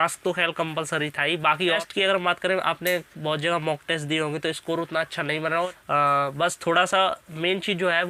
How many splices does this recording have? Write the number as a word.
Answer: two